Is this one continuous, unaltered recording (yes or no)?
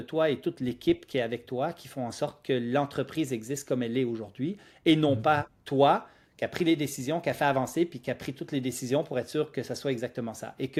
yes